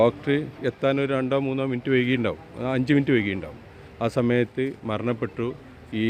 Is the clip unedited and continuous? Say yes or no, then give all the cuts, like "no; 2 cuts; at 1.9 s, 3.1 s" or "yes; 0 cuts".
yes; 0 cuts